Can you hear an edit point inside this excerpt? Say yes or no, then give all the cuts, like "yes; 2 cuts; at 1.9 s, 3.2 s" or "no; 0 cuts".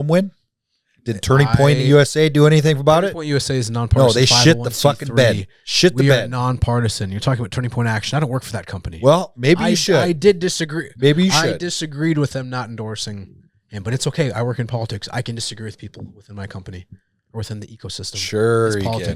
no; 0 cuts